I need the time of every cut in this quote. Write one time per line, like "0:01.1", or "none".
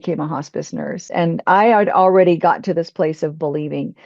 0:01.1